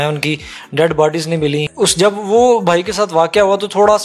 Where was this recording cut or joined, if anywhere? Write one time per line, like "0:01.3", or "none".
0:01.7